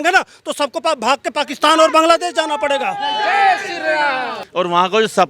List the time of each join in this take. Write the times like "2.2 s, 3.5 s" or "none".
4.3 s